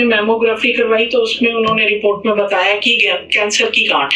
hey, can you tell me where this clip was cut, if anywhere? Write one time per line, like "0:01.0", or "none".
none